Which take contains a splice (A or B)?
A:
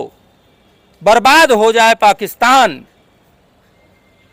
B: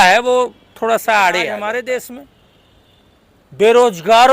B